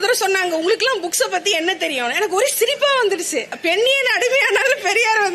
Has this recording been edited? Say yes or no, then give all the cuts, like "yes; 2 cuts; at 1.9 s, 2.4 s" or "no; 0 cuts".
yes; 1 cut; at 3.5 s